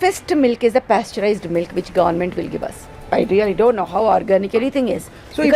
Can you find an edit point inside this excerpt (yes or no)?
yes